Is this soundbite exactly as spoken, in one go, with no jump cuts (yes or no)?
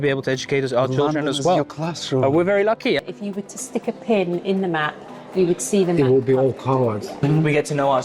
no